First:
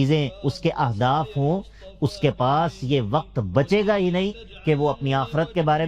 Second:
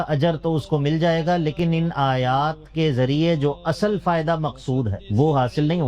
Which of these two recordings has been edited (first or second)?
second